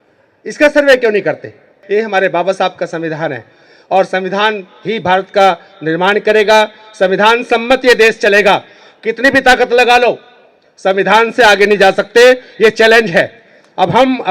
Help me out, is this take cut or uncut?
cut